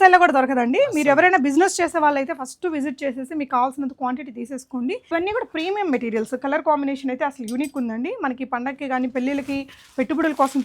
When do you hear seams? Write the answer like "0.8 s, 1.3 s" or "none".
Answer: 5.0 s